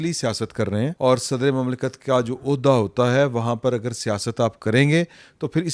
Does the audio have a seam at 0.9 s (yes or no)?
yes